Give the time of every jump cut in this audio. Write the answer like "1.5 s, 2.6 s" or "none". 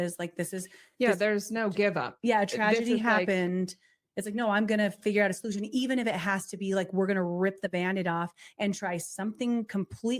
none